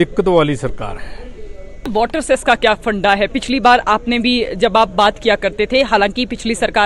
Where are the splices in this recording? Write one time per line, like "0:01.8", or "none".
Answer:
0:01.9